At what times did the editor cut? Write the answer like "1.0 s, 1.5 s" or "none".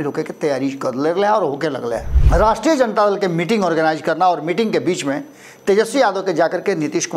2.1 s